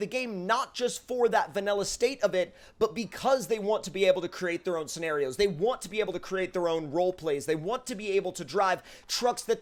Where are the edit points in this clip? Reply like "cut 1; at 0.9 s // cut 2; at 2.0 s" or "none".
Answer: none